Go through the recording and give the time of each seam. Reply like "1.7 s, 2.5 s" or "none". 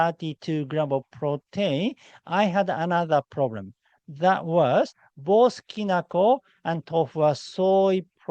none